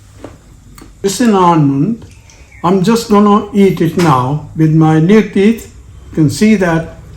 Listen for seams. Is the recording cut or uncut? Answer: cut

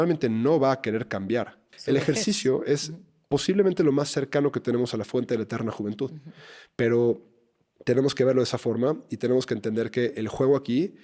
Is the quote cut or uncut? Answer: cut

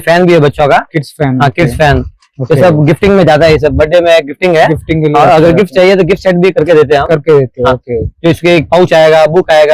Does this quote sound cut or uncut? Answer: uncut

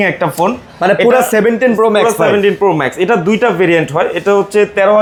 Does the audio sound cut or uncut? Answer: uncut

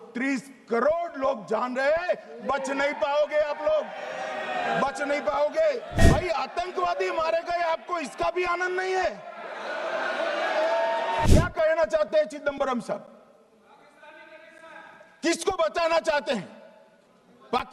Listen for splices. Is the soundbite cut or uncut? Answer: cut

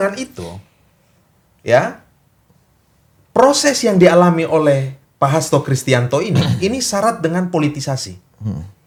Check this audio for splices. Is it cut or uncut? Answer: uncut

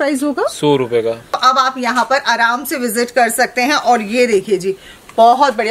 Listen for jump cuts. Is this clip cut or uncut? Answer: cut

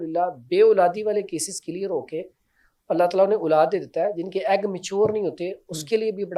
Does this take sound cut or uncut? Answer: uncut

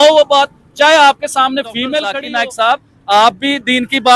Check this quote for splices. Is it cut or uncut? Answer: cut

